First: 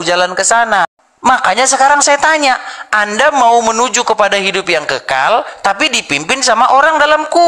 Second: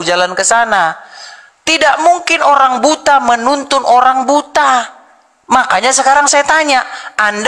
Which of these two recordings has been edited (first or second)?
first